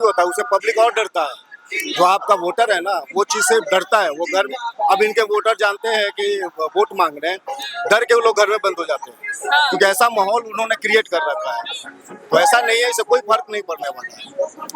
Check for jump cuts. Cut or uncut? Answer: uncut